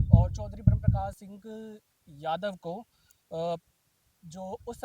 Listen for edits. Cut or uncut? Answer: cut